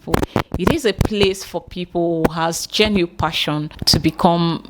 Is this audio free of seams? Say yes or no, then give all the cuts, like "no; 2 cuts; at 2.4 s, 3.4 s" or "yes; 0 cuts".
no; 1 cut; at 3.7 s